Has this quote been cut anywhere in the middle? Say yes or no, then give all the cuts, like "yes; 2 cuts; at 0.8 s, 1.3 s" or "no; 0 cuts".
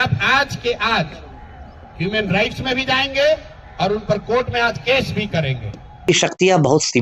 yes; 1 cut; at 6.1 s